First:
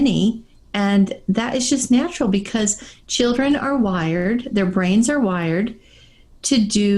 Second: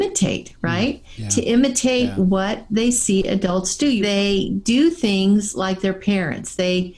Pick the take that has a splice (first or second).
second